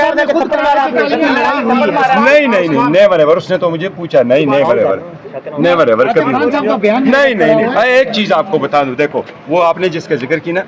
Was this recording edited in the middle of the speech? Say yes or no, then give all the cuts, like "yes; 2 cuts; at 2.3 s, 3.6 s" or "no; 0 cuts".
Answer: no; 0 cuts